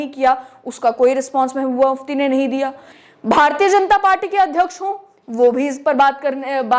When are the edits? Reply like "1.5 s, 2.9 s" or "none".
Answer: 2.9 s